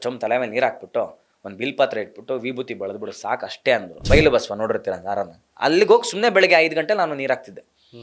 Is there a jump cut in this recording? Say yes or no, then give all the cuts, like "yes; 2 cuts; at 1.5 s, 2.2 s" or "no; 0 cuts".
yes; 1 cut; at 4.0 s